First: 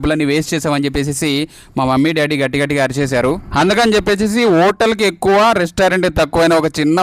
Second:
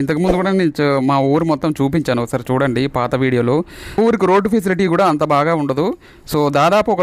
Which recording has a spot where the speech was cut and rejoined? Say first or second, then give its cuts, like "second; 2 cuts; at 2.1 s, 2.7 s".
second; 1 cut; at 4.0 s